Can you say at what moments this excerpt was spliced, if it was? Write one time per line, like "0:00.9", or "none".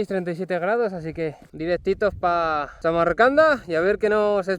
0:01.4
0:02.7